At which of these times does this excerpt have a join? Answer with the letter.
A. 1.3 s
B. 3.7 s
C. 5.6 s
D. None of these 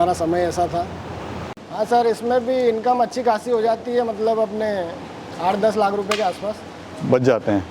A